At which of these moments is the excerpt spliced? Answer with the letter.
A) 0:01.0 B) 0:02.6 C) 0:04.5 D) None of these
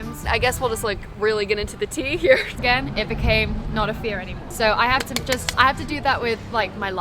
B